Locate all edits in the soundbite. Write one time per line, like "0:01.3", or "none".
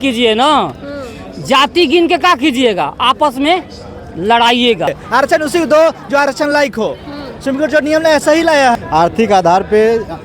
0:05.0
0:08.7